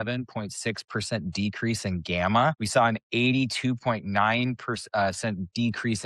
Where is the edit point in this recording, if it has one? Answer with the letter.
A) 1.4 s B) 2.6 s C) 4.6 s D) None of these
B